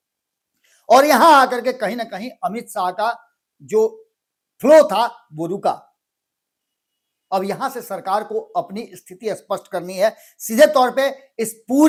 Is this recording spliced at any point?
no; 0 cuts

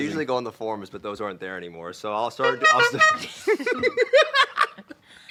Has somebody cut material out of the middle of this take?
no; 0 cuts

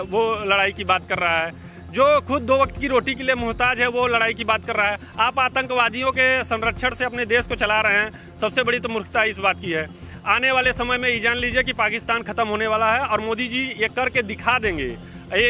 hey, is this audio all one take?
yes; 0 cuts

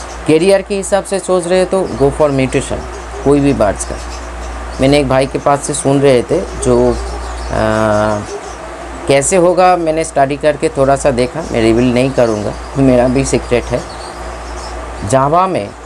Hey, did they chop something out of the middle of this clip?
no; 0 cuts

